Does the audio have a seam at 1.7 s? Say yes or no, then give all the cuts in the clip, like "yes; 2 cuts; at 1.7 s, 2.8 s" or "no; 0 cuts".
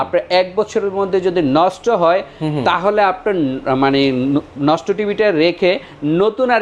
no; 0 cuts